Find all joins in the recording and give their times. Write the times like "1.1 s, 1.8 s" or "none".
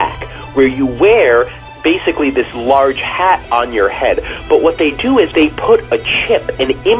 1.6 s, 5.3 s